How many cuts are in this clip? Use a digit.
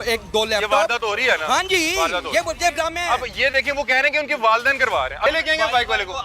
1